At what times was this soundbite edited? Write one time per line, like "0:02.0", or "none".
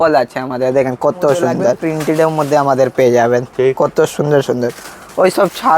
0:01.8